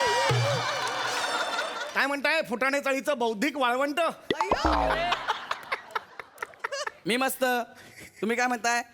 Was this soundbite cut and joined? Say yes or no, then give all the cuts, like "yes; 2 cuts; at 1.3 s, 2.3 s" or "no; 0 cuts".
yes; 1 cut; at 1.8 s